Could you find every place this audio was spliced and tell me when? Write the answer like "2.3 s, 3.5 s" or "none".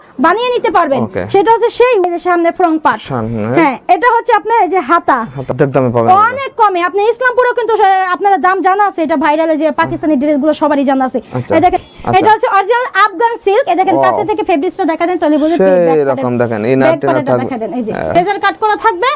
2.1 s, 5.5 s, 11.8 s, 18.1 s